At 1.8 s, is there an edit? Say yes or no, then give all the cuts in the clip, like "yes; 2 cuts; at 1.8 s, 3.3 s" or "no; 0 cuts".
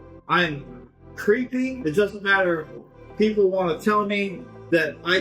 yes; 1 cut; at 1.8 s